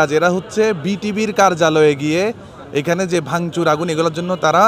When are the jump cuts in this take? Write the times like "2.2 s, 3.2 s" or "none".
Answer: none

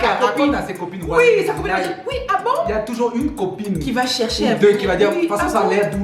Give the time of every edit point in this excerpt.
none

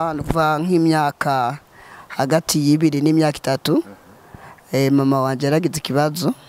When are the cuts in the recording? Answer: none

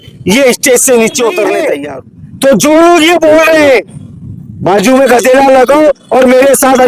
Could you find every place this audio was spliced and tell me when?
1.8 s

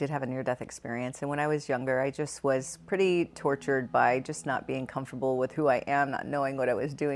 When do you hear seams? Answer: none

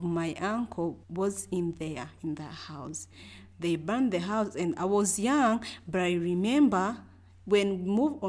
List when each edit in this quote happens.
none

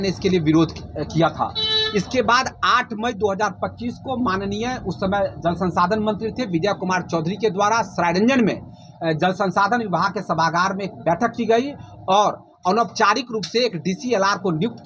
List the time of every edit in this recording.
none

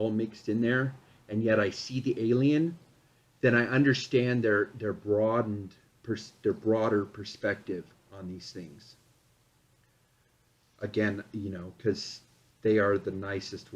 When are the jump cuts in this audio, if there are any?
none

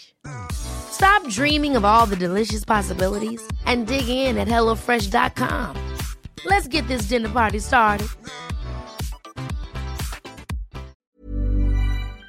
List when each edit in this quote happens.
11.0 s

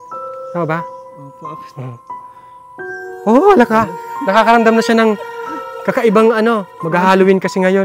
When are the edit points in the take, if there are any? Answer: none

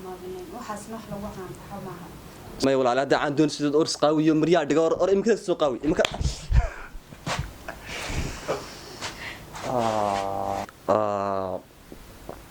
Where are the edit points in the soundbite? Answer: 2.6 s, 10.7 s

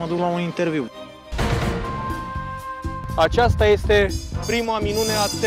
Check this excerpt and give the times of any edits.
0.9 s, 1.9 s

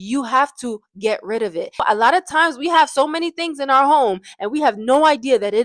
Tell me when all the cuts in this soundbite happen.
1.8 s

